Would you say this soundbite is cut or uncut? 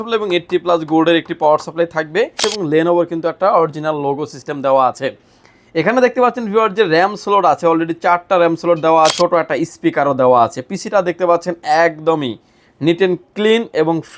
cut